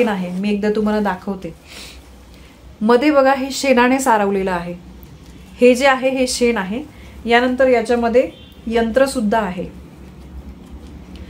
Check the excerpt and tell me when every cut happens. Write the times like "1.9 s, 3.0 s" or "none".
none